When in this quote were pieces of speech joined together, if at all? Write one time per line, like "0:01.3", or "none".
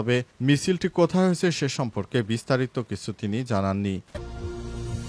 0:04.1